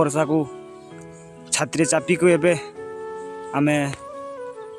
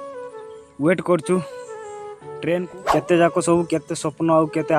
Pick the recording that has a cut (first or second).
second